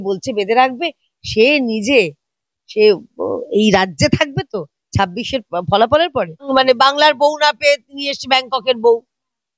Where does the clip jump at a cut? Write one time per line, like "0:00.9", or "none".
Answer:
0:06.5